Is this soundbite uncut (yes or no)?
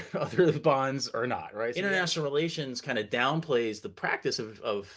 no